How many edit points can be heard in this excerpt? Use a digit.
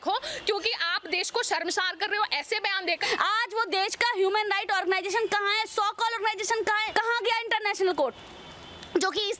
1